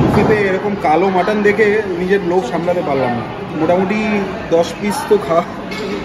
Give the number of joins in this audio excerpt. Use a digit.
1